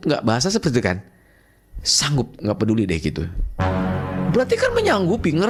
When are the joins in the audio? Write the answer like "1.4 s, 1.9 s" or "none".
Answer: none